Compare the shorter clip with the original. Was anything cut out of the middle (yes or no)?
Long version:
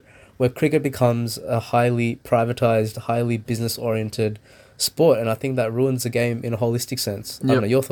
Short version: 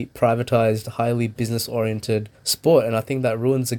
yes